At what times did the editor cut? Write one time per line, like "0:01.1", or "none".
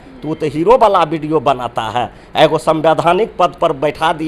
none